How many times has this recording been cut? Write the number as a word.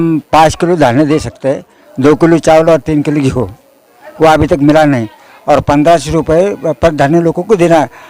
zero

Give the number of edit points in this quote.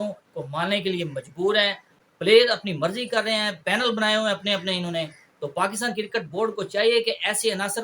one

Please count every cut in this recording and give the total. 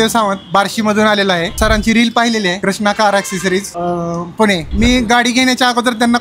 four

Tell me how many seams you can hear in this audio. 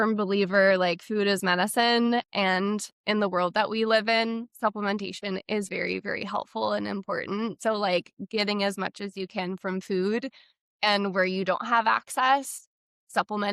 zero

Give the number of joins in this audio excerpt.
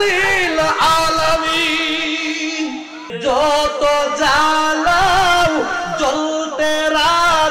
one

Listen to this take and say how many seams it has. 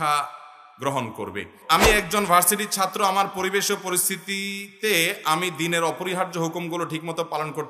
one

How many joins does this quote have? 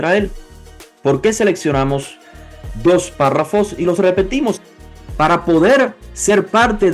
one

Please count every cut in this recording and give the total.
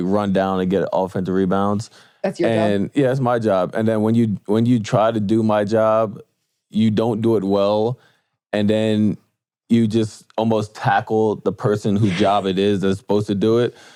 zero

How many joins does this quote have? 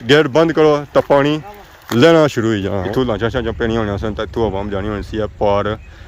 one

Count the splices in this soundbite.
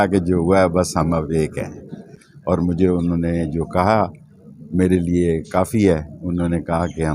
one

